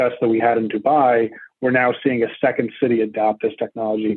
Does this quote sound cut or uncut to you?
uncut